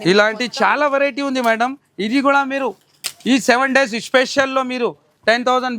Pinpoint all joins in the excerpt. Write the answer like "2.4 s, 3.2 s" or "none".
none